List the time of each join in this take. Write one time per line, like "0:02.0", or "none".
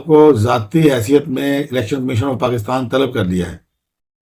none

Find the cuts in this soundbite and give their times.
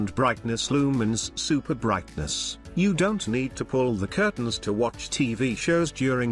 0:01.0

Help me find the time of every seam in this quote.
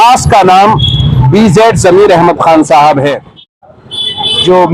0:03.7

